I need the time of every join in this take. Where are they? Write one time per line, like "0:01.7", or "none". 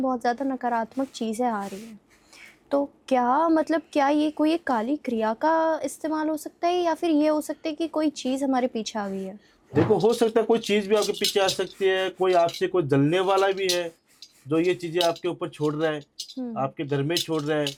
none